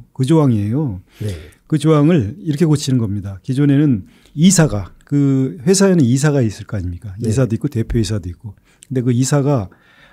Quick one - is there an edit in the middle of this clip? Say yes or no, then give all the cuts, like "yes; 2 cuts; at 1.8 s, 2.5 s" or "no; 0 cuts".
no; 0 cuts